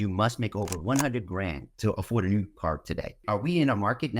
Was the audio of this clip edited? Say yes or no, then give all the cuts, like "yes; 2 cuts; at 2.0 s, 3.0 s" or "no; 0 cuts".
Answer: yes; 2 cuts; at 1.7 s, 3.2 s